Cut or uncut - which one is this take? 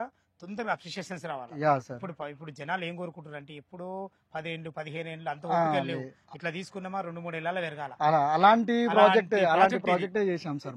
uncut